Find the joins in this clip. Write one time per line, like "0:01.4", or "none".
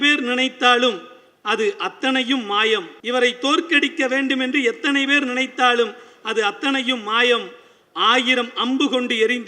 0:02.9